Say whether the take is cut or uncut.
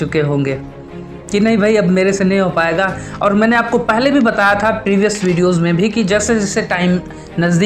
uncut